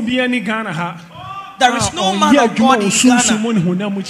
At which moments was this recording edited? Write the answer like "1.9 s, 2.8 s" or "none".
none